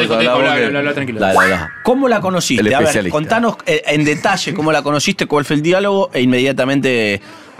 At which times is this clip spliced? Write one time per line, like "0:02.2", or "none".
0:02.7